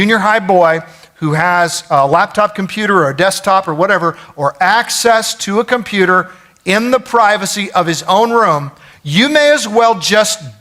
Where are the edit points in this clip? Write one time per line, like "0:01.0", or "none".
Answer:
none

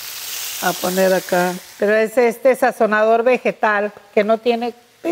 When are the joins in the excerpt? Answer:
0:01.6

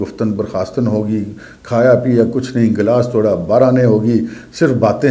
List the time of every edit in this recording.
none

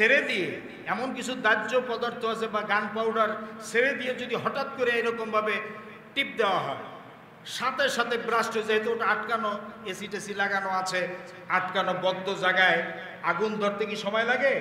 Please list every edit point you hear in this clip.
none

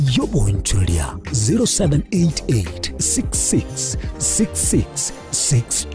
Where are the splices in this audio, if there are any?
none

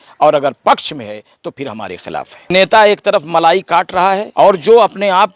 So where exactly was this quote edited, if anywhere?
0:02.5
0:04.3

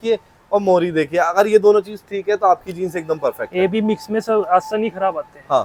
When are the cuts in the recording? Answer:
none

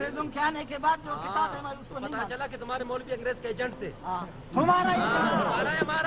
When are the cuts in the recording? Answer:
none

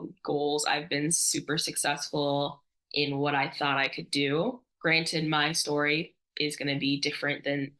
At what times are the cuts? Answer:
0:04.7

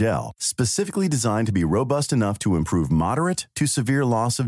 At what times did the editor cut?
none

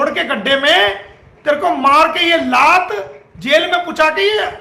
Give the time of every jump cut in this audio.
none

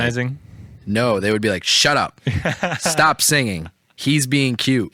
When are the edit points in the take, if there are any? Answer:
none

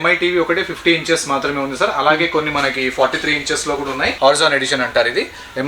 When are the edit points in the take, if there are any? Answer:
0:04.1

